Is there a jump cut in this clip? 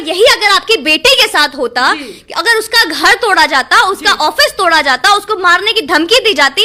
no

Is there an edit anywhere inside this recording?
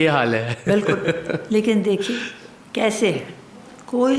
no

